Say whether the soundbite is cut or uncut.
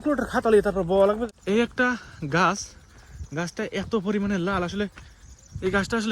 cut